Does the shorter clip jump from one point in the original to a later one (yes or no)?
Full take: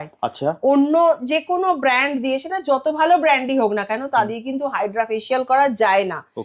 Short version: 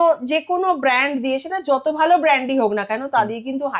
no